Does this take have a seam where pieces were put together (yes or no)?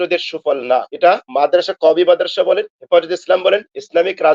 yes